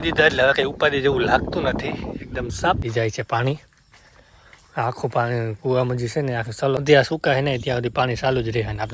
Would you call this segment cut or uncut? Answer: cut